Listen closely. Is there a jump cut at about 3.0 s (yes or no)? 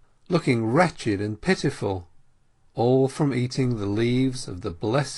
no